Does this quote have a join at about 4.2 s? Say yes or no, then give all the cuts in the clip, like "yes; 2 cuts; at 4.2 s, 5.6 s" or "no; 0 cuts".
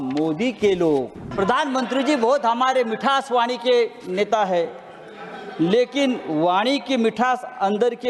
no; 1 cut; at 1.3 s